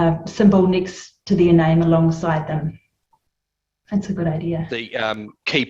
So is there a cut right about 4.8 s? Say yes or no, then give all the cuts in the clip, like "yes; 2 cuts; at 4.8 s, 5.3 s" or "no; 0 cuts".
yes; 1 cut; at 4.8 s